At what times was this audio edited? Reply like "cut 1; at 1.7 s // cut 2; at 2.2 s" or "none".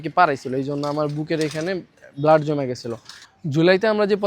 cut 1; at 3.2 s